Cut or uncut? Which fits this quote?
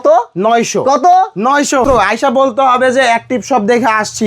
cut